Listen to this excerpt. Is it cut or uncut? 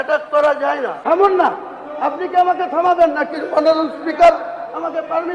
cut